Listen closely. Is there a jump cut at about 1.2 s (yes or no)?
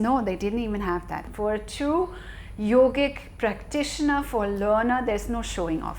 yes